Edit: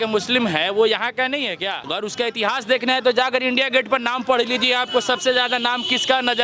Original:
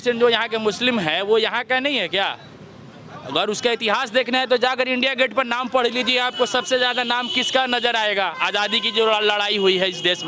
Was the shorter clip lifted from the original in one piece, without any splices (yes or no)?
no